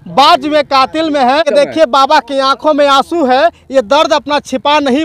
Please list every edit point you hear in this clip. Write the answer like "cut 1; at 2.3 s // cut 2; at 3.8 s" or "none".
cut 1; at 1.5 s